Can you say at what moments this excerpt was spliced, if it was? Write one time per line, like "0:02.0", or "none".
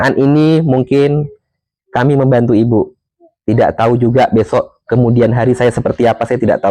none